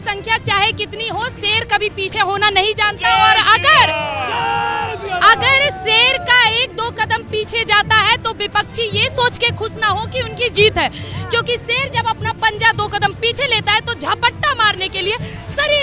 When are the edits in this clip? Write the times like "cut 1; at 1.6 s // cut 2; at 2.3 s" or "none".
none